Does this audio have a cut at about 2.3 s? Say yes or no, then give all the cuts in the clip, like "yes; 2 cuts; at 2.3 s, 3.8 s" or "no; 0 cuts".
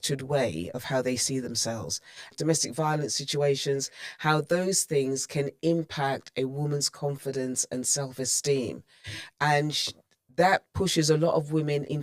yes; 1 cut; at 2.3 s